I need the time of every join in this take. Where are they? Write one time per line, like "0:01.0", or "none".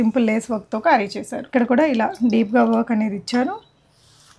0:01.5